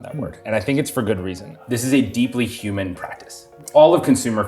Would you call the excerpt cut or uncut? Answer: cut